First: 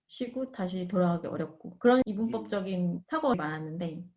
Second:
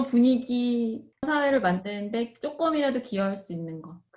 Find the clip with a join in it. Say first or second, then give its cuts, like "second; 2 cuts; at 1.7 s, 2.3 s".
second; 1 cut; at 1.3 s